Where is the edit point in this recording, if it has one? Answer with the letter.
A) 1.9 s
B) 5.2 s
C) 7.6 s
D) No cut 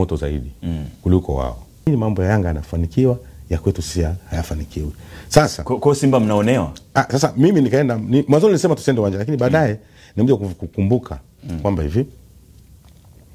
A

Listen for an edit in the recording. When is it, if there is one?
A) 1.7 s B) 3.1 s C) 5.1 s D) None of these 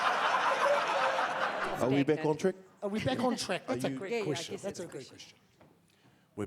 A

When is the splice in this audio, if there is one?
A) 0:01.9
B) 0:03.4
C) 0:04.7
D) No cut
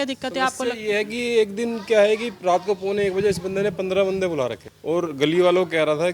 C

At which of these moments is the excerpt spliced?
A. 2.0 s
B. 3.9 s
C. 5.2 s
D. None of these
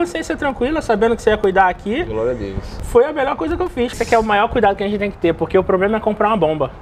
B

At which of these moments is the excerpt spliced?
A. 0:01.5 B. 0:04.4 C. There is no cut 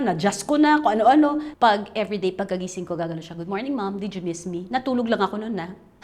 A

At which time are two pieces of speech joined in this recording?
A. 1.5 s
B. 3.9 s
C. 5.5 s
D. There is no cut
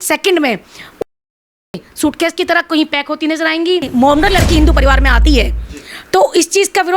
B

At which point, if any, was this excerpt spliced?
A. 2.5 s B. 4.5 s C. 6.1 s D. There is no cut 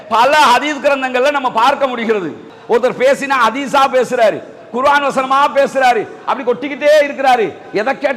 A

